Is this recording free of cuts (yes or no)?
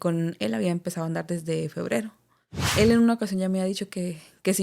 no